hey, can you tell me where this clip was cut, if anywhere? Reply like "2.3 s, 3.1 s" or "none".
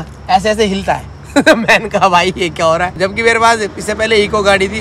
2.9 s